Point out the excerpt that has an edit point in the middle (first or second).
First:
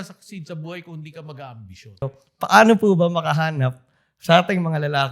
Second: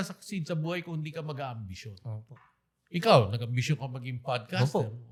first